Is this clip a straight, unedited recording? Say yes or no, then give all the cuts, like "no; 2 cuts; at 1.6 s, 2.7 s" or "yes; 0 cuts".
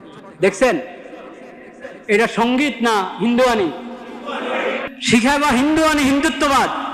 no; 1 cut; at 4.9 s